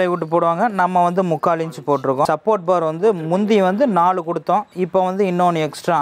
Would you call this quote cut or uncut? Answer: cut